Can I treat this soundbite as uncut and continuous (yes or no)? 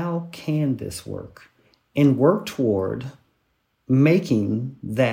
yes